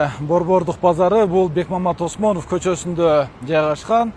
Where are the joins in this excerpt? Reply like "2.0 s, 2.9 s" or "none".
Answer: none